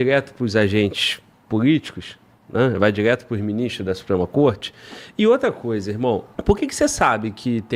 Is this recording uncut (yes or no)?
no